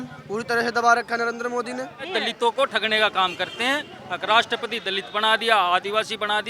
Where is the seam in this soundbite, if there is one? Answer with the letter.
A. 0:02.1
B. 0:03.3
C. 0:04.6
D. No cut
A